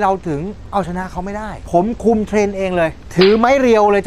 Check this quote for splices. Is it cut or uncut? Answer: cut